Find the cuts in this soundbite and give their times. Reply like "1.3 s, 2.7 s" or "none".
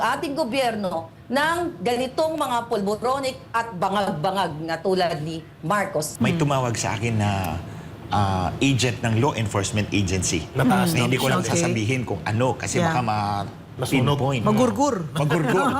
6.1 s